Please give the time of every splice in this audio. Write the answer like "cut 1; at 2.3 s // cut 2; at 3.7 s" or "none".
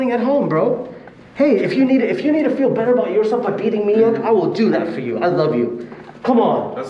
none